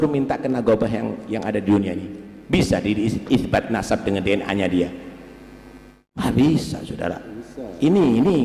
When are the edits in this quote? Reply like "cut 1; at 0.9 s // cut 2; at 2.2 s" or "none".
none